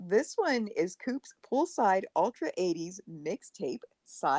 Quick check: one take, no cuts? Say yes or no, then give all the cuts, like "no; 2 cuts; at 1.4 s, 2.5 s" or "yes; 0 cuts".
yes; 0 cuts